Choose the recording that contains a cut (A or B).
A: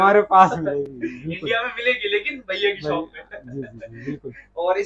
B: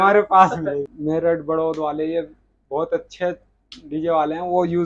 B